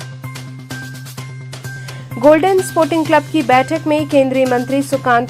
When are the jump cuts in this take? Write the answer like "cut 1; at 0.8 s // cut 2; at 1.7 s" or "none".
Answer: cut 1; at 1.0 s